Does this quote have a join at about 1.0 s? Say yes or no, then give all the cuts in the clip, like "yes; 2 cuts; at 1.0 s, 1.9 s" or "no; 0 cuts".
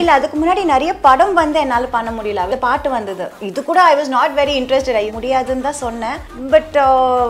no; 3 cuts; at 2.5 s, 5.1 s, 6.3 s